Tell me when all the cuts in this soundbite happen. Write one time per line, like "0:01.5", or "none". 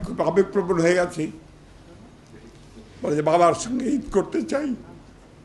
none